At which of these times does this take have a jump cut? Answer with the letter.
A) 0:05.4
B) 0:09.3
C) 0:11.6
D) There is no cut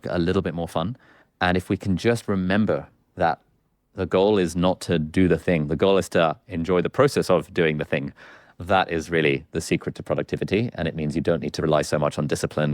C